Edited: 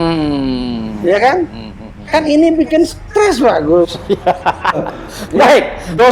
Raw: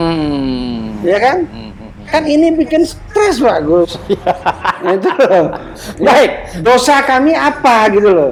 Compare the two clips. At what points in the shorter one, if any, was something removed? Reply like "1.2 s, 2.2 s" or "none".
4.8 s